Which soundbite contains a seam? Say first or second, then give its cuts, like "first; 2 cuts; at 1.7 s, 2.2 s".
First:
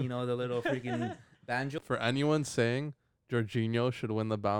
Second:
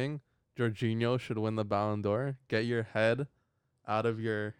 first; 1 cut; at 1.8 s